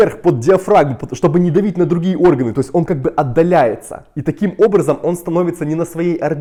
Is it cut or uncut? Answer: uncut